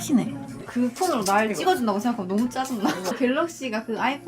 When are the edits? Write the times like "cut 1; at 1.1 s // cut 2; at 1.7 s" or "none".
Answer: cut 1; at 3.0 s